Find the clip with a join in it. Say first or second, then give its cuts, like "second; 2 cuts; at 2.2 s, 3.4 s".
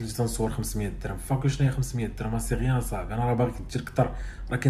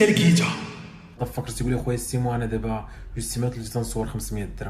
second; 1 cut; at 1.2 s